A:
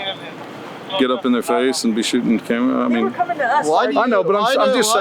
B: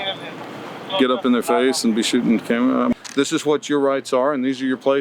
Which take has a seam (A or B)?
B